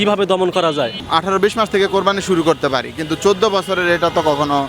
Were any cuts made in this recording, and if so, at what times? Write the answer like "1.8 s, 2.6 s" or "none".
1.0 s